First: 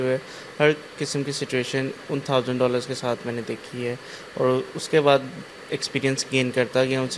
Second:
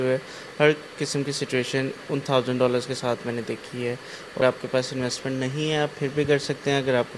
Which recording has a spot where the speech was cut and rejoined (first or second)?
second